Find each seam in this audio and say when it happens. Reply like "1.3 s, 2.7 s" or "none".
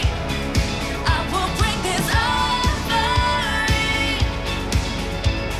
none